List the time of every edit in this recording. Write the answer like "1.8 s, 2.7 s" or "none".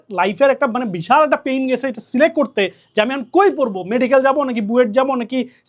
none